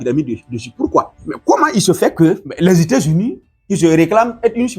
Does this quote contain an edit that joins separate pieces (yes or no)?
yes